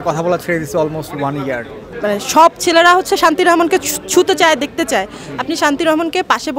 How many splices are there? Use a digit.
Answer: 1